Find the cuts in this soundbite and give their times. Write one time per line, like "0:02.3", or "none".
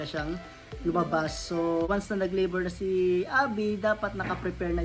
0:01.9